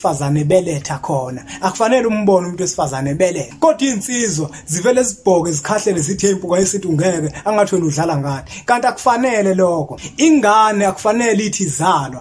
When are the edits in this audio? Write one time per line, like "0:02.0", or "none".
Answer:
0:03.5
0:10.0